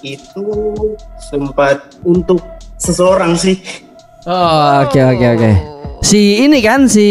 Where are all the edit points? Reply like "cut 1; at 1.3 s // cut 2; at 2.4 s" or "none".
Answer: cut 1; at 1.1 s // cut 2; at 1.9 s